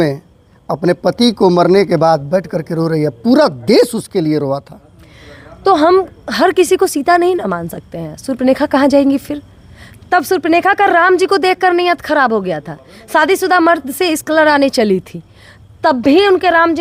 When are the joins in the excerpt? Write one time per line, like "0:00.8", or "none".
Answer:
none